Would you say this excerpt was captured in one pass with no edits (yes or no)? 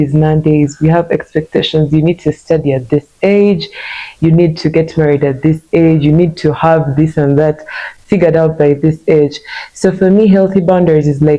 yes